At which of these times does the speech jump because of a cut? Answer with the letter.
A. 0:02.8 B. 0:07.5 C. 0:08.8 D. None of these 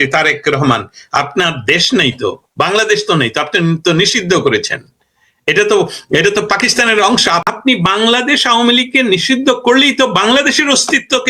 B